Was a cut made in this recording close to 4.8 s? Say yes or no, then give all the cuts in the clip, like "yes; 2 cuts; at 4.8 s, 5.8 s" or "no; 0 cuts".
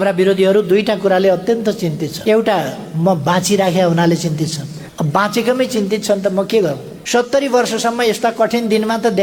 yes; 3 cuts; at 2.1 s, 4.8 s, 7.0 s